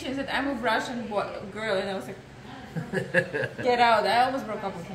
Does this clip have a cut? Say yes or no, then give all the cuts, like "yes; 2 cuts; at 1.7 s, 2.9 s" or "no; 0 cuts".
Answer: no; 0 cuts